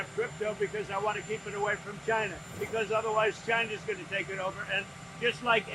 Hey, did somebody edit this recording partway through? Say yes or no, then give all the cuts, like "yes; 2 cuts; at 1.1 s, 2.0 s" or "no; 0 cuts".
yes; 1 cut; at 2.4 s